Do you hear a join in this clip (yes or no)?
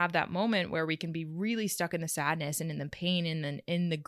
no